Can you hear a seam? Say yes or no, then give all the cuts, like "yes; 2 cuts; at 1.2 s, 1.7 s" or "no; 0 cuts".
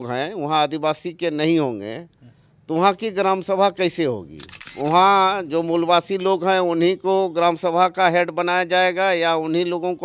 yes; 1 cut; at 4.7 s